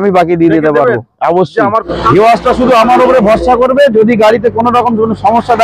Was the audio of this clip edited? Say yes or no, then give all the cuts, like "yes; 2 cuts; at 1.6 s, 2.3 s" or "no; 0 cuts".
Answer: yes; 1 cut; at 1.9 s